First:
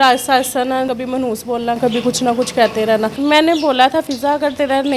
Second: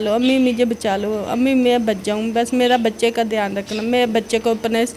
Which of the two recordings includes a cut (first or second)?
first